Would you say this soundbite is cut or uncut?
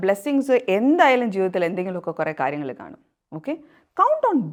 uncut